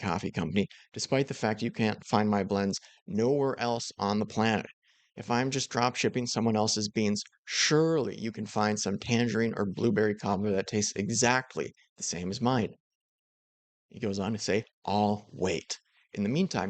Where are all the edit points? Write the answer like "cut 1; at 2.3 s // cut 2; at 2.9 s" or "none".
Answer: none